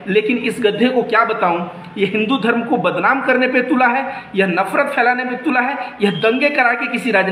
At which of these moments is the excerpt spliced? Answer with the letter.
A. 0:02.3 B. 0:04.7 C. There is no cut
C